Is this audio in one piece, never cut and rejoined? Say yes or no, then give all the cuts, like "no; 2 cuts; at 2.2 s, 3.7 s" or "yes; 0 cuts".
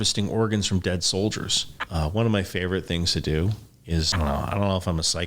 no; 2 cuts; at 1.8 s, 4.1 s